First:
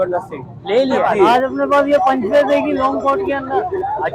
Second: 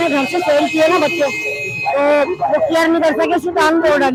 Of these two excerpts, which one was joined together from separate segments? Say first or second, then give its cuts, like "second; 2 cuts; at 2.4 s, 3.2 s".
first; 1 cut; at 1.3 s